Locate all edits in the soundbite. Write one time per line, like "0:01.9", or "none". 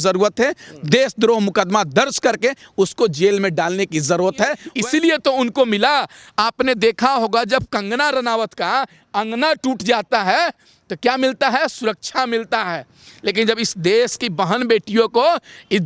0:04.6